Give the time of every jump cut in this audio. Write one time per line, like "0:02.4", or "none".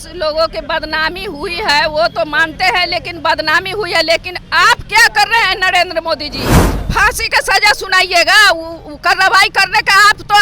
0:06.7

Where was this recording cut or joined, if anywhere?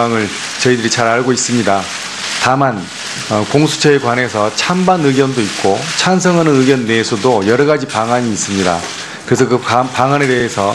0:03.5

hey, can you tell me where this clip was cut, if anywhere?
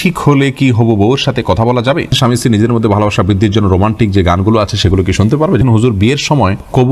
0:02.1
0:05.6

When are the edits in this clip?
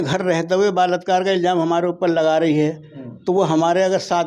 none

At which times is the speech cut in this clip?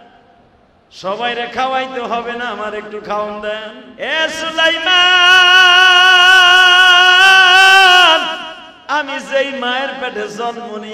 0:03.8

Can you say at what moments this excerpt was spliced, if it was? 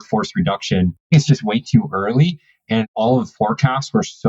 0:01.0
0:02.7

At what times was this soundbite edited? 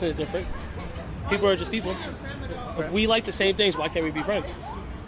none

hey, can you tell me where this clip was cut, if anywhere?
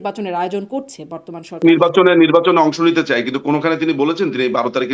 0:01.6

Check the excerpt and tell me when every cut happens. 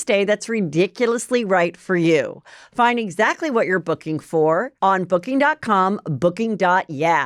0:04.7

